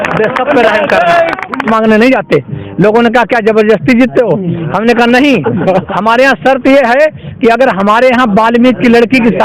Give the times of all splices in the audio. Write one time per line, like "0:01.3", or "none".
0:01.7